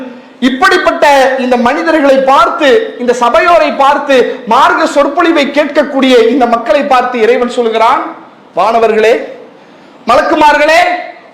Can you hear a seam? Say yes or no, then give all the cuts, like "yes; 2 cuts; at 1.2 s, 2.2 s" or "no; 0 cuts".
no; 0 cuts